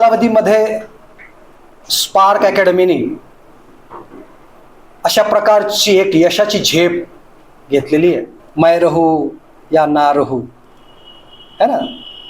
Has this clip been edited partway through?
yes; 1 cut; at 8.4 s

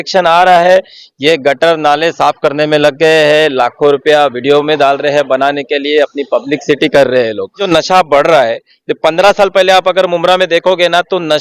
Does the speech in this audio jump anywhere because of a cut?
yes; 1 cut; at 7.6 s

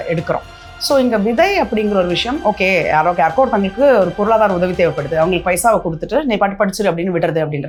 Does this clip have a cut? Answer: no; 0 cuts

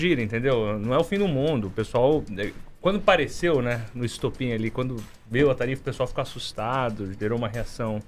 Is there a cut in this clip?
no; 0 cuts

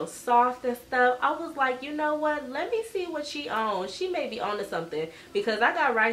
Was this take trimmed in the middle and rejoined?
no; 0 cuts

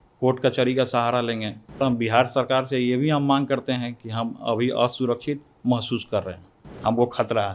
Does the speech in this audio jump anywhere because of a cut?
yes; 2 cuts; at 1.8 s, 6.6 s

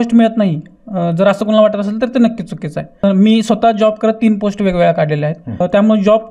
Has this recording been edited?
yes; 2 cuts; at 2.9 s, 5.5 s

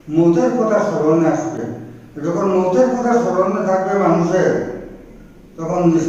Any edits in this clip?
no; 0 cuts

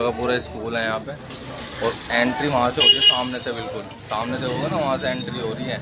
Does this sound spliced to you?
no; 0 cuts

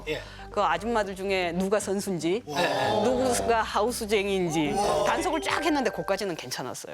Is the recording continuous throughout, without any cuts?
no; 1 cut; at 5.0 s

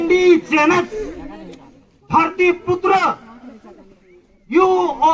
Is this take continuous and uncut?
yes; 0 cuts

